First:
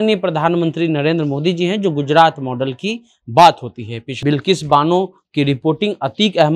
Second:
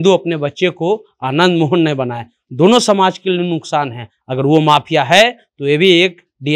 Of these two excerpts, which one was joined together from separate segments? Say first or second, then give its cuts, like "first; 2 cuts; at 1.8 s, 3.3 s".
first; 1 cut; at 4.0 s